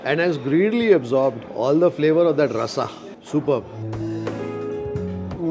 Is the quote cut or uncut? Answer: uncut